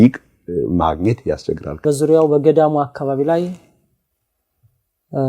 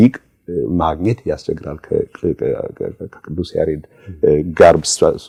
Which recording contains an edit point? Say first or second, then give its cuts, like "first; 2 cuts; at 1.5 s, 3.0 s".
first; 1 cut; at 1.8 s